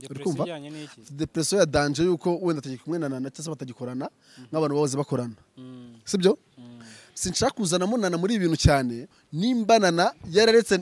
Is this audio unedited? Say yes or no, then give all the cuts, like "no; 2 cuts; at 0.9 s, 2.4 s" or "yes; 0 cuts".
no; 1 cut; at 9.2 s